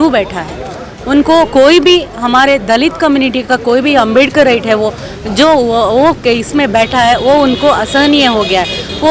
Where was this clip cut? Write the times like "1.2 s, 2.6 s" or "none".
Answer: none